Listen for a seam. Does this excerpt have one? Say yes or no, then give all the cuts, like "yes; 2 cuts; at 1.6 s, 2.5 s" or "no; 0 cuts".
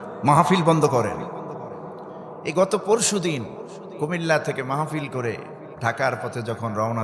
yes; 1 cut; at 2.0 s